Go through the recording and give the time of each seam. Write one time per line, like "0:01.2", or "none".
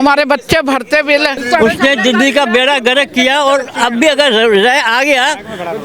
0:01.4